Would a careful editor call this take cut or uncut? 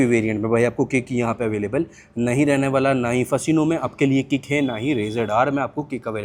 uncut